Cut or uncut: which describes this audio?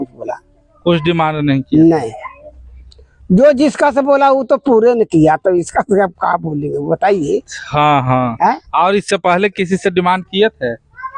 uncut